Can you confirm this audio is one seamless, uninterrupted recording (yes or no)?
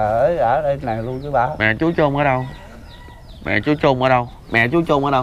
yes